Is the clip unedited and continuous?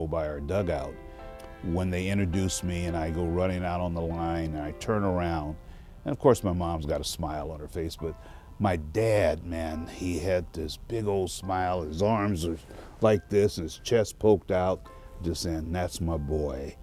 yes; 0 cuts

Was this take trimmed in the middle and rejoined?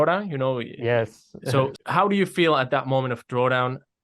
yes; 1 cut; at 1.7 s

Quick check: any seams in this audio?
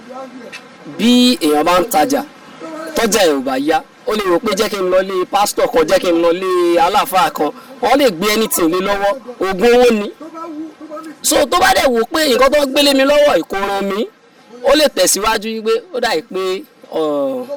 no; 0 cuts

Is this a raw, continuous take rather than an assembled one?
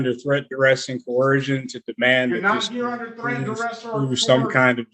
yes; 0 cuts

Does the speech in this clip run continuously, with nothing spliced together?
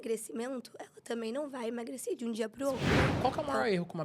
no; 1 cut; at 3.1 s

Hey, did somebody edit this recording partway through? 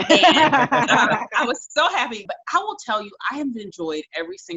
yes; 1 cut; at 2.3 s

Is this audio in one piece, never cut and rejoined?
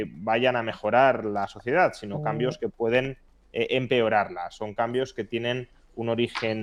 yes; 0 cuts

